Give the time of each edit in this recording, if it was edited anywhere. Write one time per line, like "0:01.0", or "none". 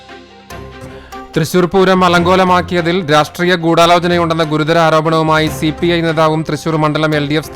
0:01.0